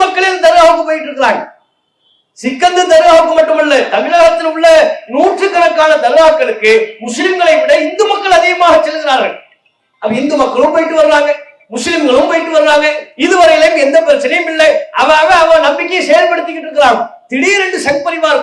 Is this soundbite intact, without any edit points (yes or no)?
yes